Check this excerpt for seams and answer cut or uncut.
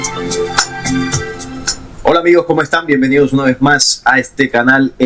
uncut